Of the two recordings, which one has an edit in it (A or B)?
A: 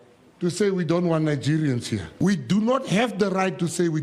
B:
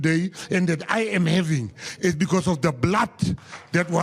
A